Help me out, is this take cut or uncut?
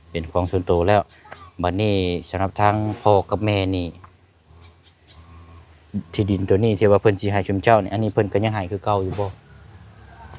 uncut